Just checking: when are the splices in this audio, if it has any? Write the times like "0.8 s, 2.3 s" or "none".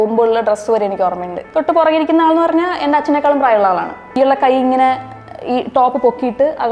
1.4 s, 4.1 s